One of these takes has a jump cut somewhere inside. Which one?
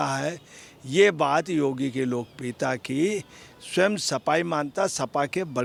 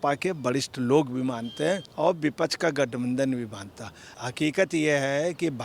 second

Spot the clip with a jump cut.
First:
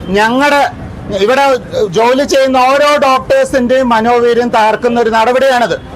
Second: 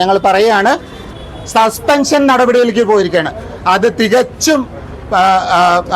second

